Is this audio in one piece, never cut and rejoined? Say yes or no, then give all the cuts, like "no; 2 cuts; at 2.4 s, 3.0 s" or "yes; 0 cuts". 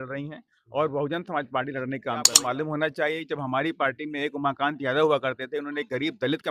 no; 1 cut; at 2.3 s